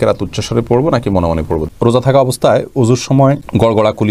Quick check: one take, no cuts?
no; 1 cut; at 1.6 s

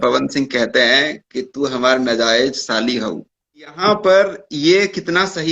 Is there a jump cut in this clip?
yes; 1 cut; at 3.8 s

